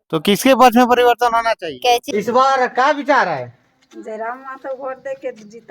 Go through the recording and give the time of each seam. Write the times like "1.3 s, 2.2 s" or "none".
2.1 s